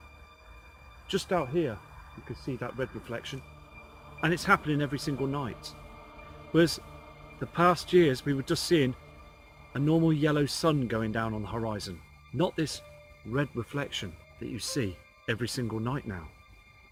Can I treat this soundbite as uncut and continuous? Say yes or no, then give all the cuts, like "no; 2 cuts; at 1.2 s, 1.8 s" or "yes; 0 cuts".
yes; 0 cuts